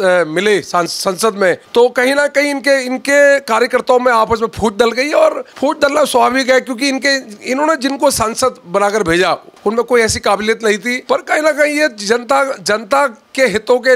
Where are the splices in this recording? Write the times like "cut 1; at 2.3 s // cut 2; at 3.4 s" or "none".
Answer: cut 1; at 1.6 s // cut 2; at 5.5 s // cut 3; at 9.5 s // cut 4; at 10.9 s